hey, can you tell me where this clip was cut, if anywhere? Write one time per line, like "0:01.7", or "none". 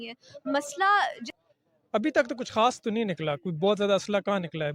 0:01.3